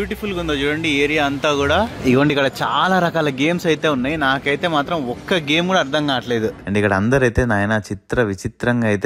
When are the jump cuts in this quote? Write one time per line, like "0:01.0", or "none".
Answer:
0:01.9
0:06.6